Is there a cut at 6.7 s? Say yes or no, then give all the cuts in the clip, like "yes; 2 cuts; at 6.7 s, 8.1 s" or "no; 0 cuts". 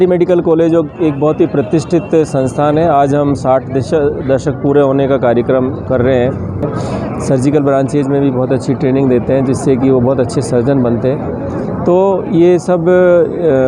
yes; 1 cut; at 6.7 s